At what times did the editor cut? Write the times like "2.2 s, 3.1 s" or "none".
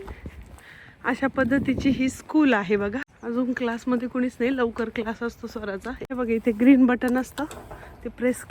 3.1 s, 6.0 s